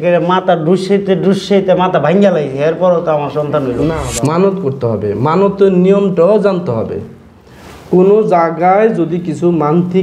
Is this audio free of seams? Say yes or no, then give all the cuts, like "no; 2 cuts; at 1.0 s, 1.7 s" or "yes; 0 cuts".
no; 1 cut; at 4.0 s